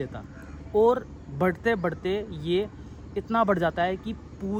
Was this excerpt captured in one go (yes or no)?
yes